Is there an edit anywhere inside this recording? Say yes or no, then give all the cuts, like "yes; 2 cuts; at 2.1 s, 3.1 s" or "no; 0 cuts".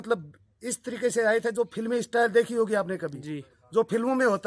no; 0 cuts